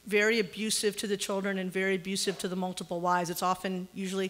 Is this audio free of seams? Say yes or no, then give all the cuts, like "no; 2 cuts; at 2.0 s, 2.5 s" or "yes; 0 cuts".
no; 1 cut; at 1.3 s